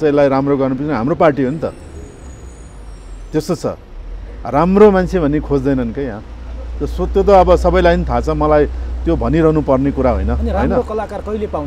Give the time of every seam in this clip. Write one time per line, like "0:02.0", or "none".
none